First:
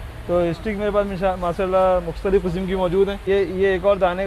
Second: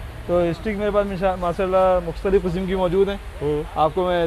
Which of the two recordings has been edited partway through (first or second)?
first